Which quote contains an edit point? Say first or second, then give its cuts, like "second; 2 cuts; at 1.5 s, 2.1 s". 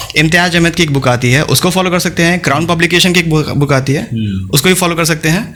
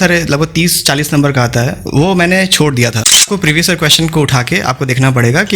second; 1 cut; at 3.3 s